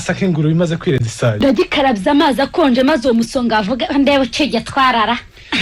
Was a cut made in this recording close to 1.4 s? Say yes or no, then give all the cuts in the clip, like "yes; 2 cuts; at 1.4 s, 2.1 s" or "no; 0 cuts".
yes; 1 cut; at 1.4 s